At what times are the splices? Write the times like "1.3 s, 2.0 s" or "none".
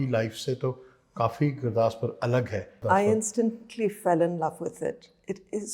2.8 s